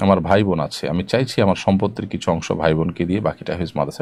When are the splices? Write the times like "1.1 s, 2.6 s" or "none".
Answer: none